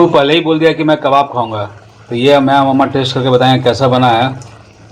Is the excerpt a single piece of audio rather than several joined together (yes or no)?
yes